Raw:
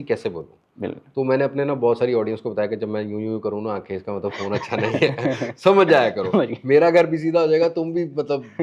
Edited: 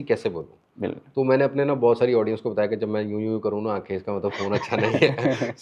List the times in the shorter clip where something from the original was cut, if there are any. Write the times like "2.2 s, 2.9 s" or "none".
none